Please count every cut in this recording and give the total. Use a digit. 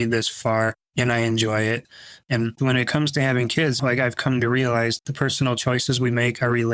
3